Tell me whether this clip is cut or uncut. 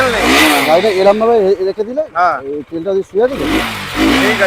uncut